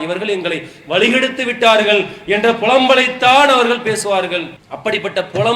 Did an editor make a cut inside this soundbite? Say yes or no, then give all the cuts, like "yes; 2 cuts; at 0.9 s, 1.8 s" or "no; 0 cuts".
no; 0 cuts